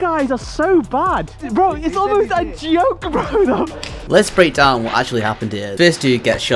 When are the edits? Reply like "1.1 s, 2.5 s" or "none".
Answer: 1.3 s, 3.7 s